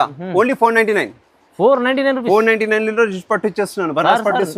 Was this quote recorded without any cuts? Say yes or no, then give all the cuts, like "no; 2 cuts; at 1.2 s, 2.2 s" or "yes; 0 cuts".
yes; 0 cuts